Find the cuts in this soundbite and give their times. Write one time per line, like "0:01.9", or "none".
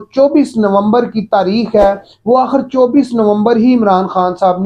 none